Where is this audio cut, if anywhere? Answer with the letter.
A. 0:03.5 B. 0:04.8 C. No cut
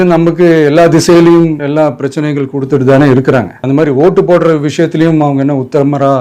A